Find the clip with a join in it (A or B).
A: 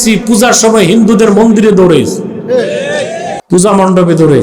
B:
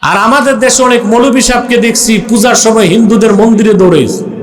A